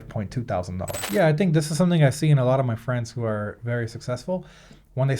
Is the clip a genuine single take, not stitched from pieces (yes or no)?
no